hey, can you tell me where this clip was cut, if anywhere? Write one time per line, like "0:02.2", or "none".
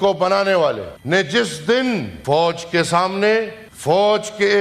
0:00.9
0:02.1
0:03.6